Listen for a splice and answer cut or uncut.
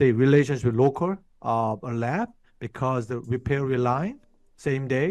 cut